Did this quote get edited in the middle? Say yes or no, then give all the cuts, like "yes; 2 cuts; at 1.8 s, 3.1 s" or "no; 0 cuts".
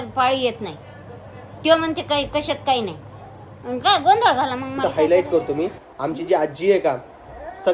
yes; 1 cut; at 4.8 s